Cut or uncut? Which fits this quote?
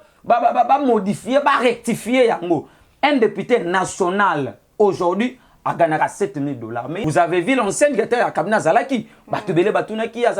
cut